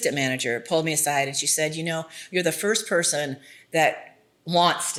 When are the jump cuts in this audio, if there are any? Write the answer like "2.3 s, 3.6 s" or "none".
none